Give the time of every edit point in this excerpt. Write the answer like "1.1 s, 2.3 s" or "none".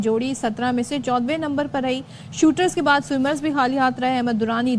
none